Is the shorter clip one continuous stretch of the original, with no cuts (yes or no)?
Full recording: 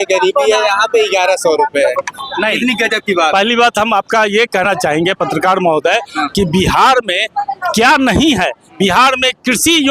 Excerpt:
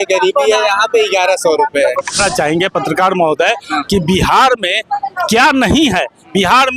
no